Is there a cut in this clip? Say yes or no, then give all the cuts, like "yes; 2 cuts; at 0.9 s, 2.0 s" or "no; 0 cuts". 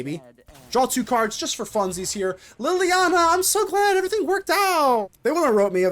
yes; 1 cut; at 5.0 s